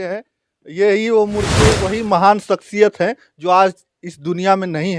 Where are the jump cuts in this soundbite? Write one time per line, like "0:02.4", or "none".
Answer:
0:01.6